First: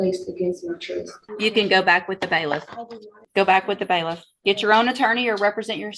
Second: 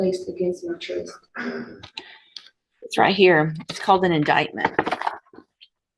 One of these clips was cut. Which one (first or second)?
first